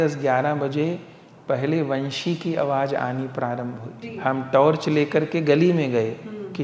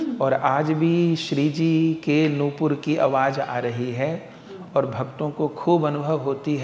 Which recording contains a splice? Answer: first; 1 cut; at 4.1 s

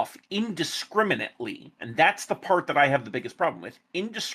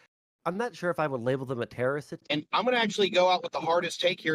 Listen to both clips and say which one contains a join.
second; 1 cut; at 2.1 s

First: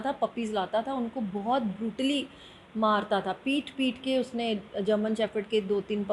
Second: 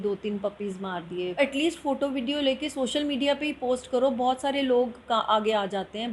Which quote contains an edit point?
second; 1 cut; at 1.4 s

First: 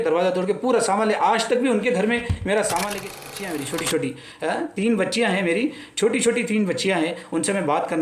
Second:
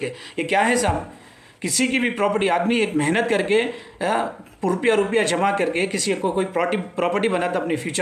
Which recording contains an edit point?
first; 1 cut; at 3.2 s

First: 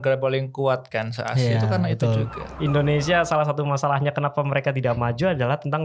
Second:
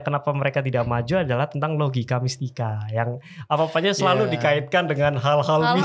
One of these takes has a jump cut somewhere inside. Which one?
first; 1 cut; at 2.5 s

